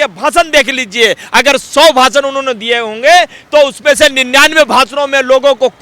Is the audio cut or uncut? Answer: uncut